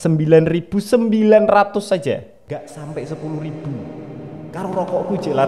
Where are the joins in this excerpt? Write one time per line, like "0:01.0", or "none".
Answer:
none